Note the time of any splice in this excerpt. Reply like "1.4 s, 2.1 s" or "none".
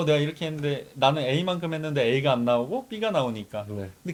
none